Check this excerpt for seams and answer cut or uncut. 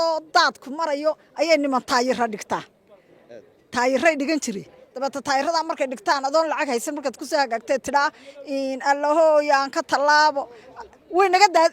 uncut